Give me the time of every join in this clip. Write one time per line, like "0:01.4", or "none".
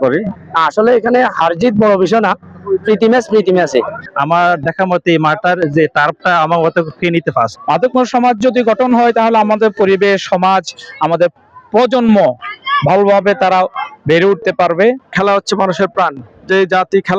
0:04.0
0:07.6
0:15.1